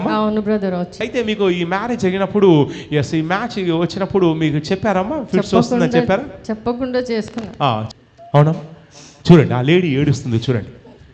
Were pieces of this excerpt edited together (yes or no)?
yes